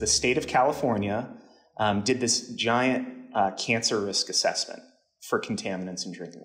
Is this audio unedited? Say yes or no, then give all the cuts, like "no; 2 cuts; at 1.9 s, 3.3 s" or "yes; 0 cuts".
yes; 0 cuts